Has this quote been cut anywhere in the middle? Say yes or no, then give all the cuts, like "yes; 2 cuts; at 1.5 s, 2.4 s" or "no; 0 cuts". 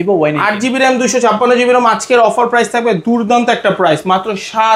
no; 0 cuts